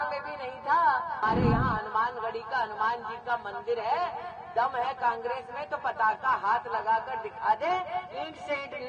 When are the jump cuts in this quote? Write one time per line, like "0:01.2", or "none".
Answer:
0:01.2